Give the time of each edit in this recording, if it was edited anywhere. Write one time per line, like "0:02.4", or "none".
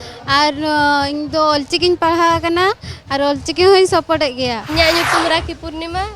0:04.6